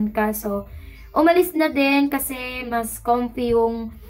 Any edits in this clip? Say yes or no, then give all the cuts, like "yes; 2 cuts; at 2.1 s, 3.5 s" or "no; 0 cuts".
no; 0 cuts